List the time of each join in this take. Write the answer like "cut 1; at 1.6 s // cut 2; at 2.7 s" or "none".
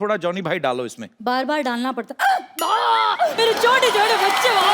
cut 1; at 1.1 s // cut 2; at 3.3 s